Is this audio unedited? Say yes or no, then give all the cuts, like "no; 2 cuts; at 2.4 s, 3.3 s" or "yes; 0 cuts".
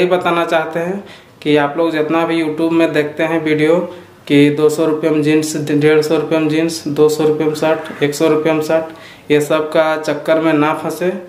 yes; 0 cuts